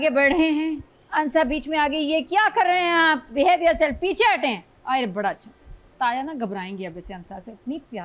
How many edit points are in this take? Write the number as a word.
one